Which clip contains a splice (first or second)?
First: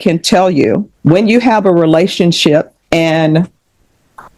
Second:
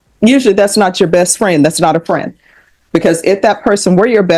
first